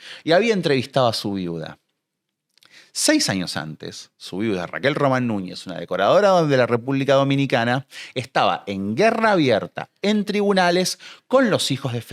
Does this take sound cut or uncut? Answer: uncut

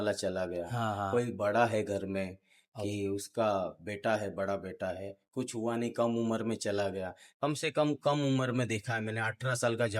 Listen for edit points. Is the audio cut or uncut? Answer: uncut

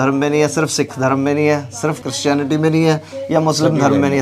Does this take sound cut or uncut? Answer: cut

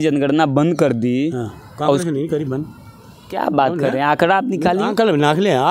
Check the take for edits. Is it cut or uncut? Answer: uncut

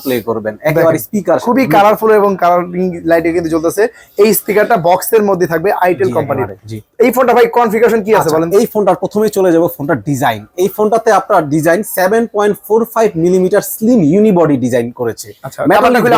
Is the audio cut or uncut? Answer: uncut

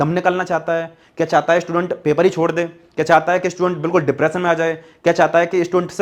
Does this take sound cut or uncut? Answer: uncut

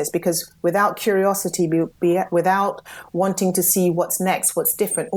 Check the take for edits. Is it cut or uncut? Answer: uncut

